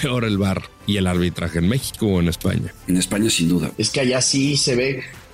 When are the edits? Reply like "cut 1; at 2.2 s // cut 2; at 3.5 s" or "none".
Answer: cut 1; at 2.7 s // cut 2; at 3.8 s